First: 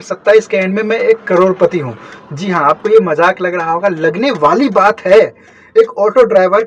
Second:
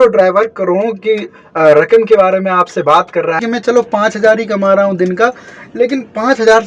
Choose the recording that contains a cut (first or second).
second